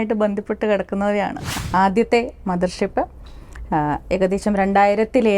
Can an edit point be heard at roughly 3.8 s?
no; 1 cut; at 1.5 s

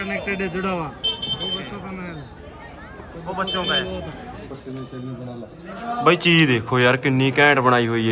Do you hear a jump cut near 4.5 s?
yes; 1 cut; at 4.5 s

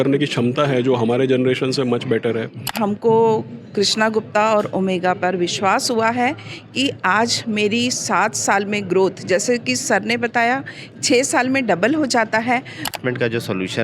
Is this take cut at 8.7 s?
no; 2 cuts; at 2.7 s, 12.9 s

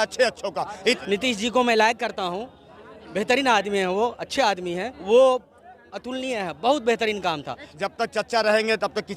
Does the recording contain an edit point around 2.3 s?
no; 3 cuts; at 1.0 s, 4.9 s, 7.7 s

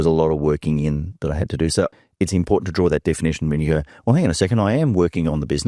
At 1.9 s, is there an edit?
yes; 1 cut; at 1.9 s

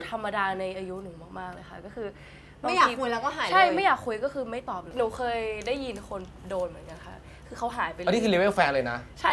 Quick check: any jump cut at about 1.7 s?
no; 0 cuts

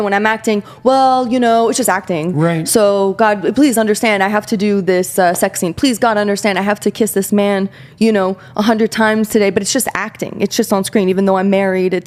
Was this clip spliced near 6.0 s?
no; 0 cuts

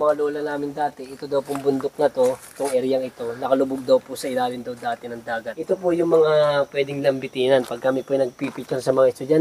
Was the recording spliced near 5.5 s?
yes; 1 cut; at 5.5 s

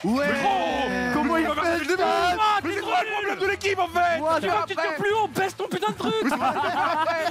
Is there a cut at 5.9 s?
no; 0 cuts

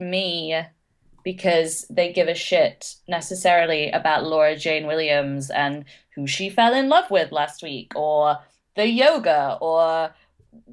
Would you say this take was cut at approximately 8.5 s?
no; 0 cuts

